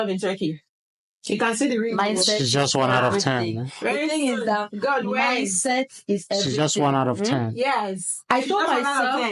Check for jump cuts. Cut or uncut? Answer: uncut